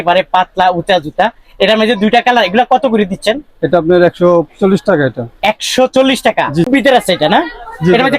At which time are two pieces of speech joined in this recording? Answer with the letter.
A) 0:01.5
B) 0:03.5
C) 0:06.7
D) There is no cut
C